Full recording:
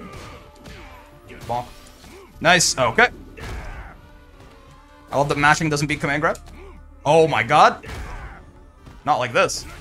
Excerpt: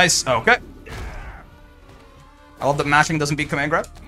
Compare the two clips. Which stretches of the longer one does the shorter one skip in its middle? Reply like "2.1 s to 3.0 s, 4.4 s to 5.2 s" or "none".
none

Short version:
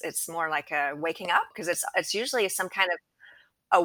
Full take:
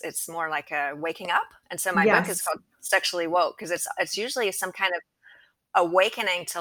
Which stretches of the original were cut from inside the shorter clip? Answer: 1.6 s to 3.6 s

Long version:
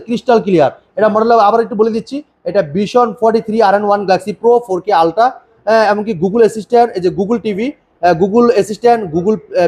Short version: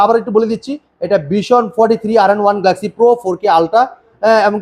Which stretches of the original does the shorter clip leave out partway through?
none

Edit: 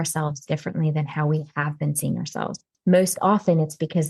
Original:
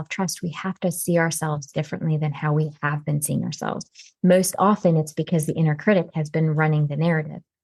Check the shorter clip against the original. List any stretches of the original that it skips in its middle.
3.9 s to 4.0 s

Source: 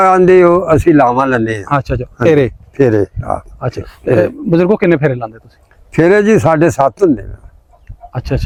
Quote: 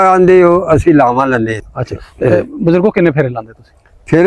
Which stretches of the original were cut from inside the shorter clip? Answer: 1.6 s to 3.5 s

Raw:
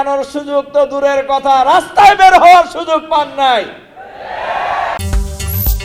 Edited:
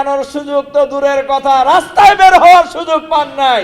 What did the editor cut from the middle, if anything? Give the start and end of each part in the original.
none

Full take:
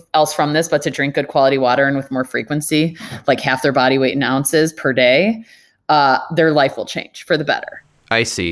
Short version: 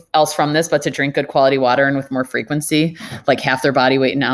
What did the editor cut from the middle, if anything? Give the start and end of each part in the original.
none

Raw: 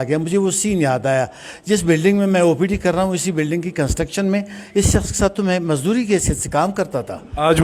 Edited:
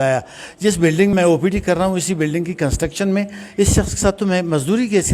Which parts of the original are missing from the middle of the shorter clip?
2.2 s to 2.3 s

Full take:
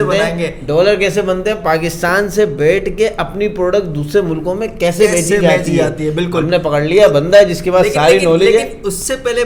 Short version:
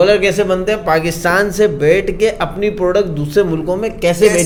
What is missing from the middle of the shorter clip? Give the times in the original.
none

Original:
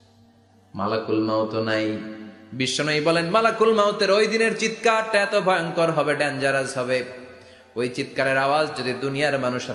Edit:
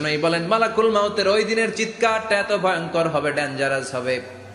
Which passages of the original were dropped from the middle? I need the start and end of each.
none

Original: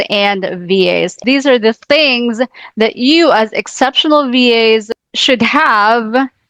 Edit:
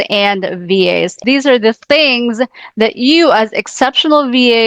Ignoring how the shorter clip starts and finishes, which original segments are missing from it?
none

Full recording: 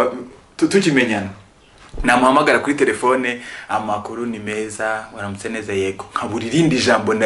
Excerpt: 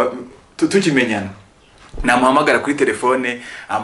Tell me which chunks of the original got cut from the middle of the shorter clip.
none

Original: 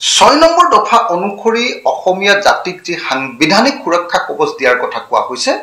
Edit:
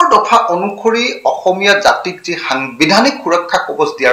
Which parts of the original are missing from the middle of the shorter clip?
none

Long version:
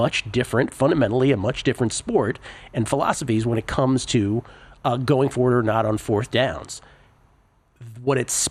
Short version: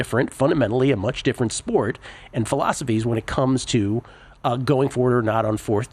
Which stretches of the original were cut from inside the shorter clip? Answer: none

